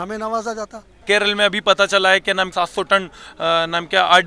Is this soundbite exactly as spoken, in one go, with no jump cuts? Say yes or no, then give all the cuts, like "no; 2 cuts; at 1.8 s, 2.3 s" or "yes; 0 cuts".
no; 2 cuts; at 1.0 s, 2.5 s